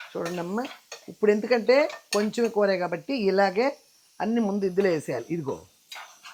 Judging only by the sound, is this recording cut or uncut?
uncut